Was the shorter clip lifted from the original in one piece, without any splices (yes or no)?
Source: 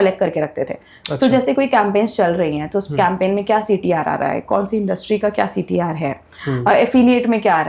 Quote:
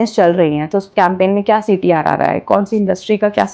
yes